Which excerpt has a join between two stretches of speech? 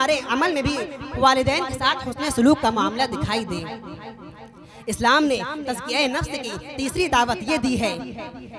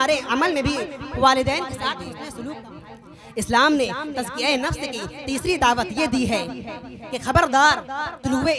second; 1 cut; at 2.6 s

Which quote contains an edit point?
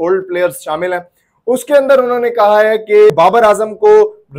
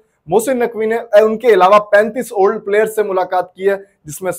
first; 1 cut; at 3.1 s

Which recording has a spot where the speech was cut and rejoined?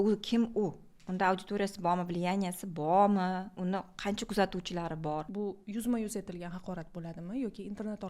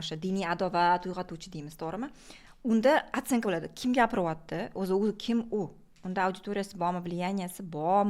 first; 1 cut; at 5.2 s

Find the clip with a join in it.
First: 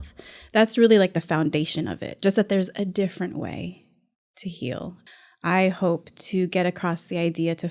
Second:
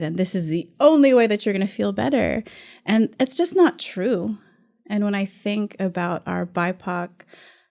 first; 1 cut; at 5.0 s

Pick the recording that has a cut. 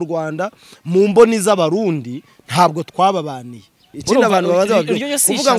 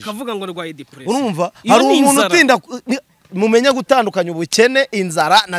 first; 1 cut; at 3.9 s

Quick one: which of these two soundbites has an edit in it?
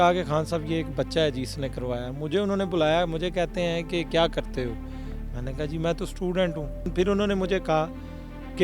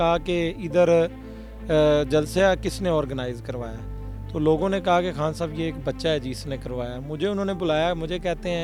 first; 1 cut; at 6.9 s

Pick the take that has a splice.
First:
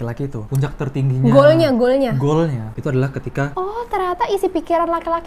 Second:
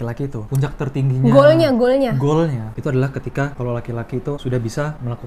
first; 1 cut; at 3.5 s

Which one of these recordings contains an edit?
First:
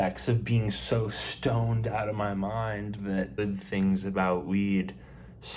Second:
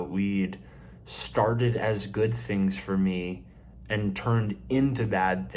first; 1 cut; at 3.3 s

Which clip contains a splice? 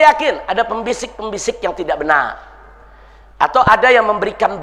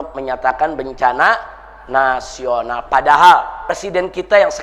second; 1 cut; at 3.6 s

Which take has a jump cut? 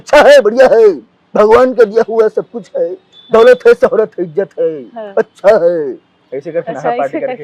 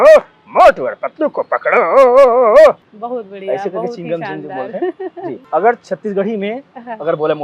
second; 2 cuts; at 2.9 s, 5.4 s

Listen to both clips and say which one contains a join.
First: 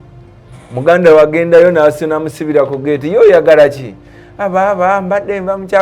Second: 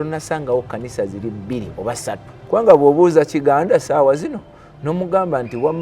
second; 1 cut; at 2.3 s

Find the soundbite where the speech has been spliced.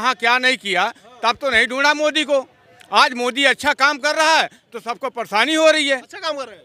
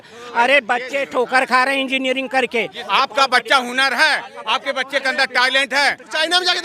second; 1 cut; at 2.8 s

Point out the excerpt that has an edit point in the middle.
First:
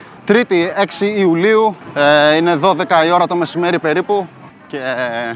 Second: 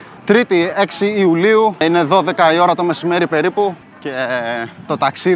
second; 2 cuts; at 1.8 s, 4.3 s

